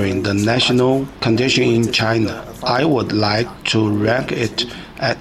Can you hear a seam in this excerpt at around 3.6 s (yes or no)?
no